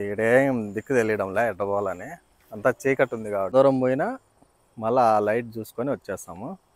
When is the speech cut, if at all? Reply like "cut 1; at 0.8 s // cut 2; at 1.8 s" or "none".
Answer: cut 1; at 3.5 s